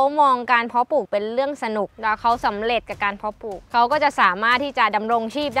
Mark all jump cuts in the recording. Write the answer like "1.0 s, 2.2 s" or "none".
1.9 s, 3.6 s